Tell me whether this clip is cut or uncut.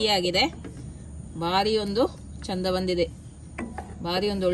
uncut